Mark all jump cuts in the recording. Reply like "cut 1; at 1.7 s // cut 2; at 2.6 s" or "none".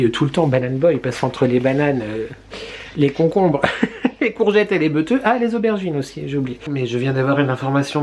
cut 1; at 6.7 s